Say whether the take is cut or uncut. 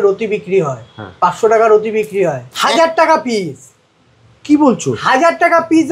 cut